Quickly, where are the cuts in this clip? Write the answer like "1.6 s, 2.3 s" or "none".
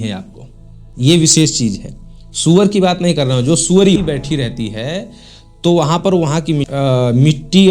4.0 s, 6.7 s